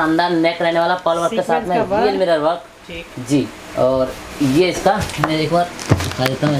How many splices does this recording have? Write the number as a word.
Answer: zero